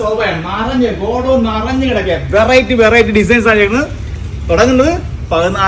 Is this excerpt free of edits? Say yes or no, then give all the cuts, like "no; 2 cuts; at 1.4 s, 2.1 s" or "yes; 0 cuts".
yes; 0 cuts